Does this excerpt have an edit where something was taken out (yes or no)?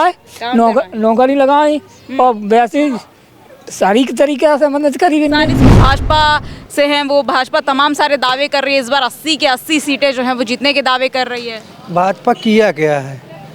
yes